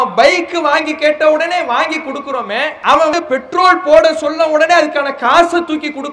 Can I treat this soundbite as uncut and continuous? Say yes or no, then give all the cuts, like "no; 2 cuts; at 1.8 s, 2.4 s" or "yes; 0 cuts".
no; 1 cut; at 3.1 s